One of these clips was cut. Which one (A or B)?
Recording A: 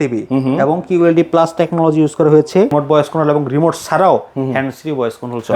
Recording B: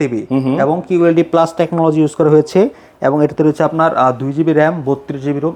A